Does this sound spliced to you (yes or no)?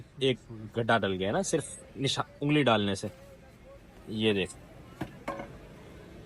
no